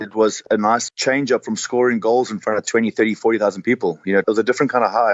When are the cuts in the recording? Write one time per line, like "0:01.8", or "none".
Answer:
0:00.8
0:04.2